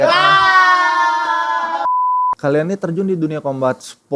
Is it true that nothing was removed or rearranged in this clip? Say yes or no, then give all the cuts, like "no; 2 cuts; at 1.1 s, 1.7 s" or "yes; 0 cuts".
no; 1 cut; at 2.0 s